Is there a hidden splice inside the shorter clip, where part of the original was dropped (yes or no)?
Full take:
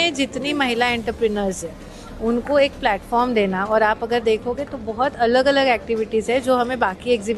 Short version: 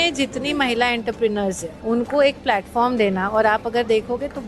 yes